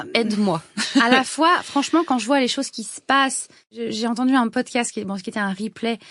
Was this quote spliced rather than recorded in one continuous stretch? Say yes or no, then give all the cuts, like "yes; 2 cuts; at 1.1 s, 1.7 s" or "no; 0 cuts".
yes; 1 cut; at 3.8 s